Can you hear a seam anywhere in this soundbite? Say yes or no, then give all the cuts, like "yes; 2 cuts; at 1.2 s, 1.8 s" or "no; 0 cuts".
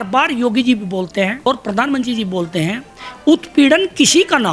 yes; 1 cut; at 1.5 s